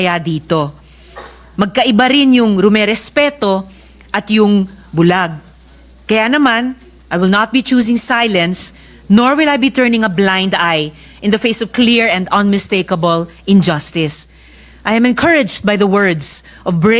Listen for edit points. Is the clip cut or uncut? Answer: uncut